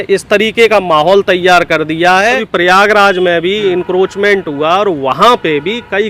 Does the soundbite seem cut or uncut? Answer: cut